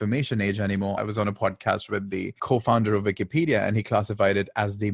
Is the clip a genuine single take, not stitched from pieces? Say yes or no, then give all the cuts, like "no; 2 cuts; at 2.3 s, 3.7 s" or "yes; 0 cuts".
no; 2 cuts; at 1.0 s, 2.4 s